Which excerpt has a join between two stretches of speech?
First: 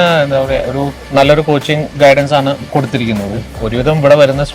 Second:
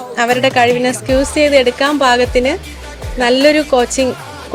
first; 2 cuts; at 1.0 s, 3.6 s

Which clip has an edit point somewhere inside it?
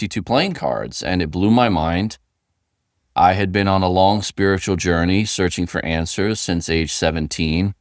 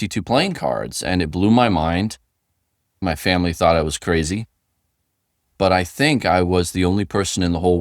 second; 2 cuts; at 3.0 s, 5.5 s

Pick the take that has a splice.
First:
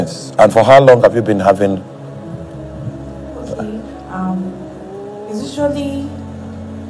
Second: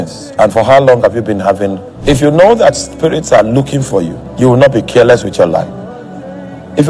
second; 2 cuts; at 1.9 s, 4.2 s

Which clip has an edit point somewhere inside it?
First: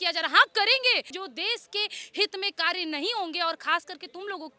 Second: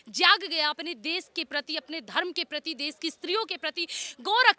first; 1 cut; at 1.2 s

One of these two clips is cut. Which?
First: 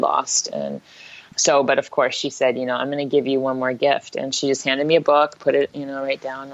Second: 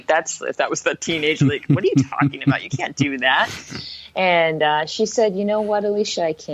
first; 1 cut; at 1.3 s

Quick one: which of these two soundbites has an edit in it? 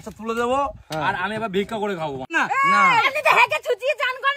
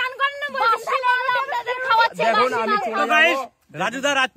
first; 1 cut; at 2.4 s

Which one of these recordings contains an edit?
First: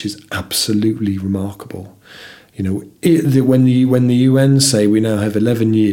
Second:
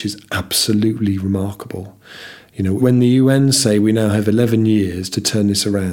second; 1 cut; at 2.8 s

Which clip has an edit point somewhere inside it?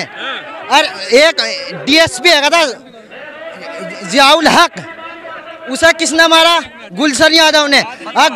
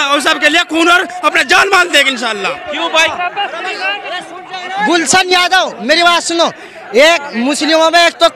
second; 1 cut; at 2.9 s

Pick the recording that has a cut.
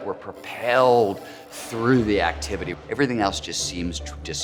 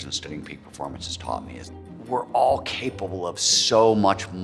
second; 1 cut; at 1.7 s

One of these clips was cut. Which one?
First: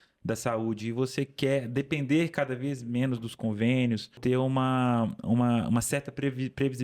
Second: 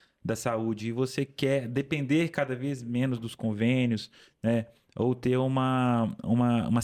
first; 1 cut; at 4.2 s

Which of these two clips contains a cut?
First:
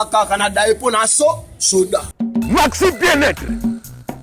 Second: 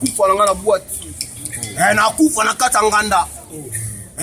first; 1 cut; at 2.2 s

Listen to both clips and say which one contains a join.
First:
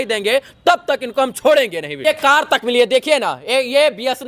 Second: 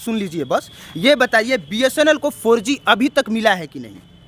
first; 1 cut; at 2.0 s

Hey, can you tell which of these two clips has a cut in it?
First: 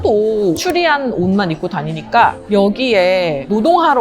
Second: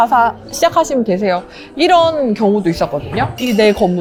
first; 1 cut; at 2.4 s

